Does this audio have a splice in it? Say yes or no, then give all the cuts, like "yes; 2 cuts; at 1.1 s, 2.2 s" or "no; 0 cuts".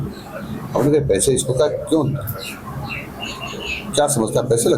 no; 0 cuts